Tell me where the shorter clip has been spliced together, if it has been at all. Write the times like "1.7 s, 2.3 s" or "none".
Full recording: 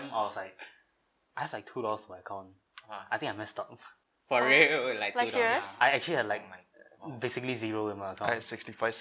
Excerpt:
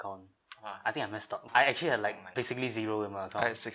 1.4 s, 2.2 s